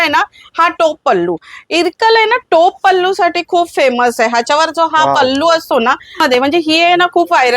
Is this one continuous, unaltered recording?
no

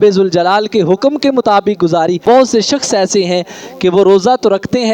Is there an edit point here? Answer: yes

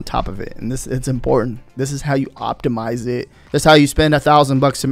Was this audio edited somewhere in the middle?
yes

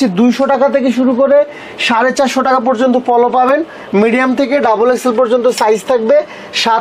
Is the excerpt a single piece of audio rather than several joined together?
yes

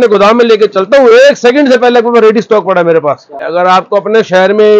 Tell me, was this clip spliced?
yes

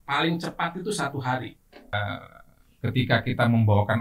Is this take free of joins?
no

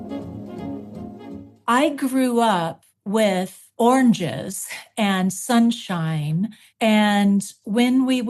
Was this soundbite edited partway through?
yes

